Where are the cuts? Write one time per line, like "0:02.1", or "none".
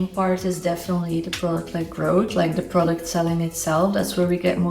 none